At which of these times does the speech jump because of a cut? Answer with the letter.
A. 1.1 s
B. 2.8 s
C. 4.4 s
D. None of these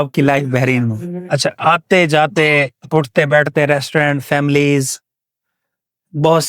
A